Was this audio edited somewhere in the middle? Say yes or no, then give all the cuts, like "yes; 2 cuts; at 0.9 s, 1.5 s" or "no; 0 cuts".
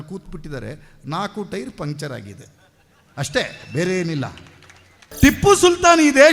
yes; 1 cut; at 5.0 s